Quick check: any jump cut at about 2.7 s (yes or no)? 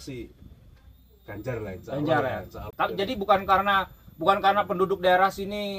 yes